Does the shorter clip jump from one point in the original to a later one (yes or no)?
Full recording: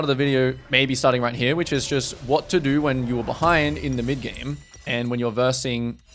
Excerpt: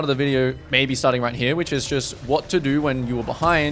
no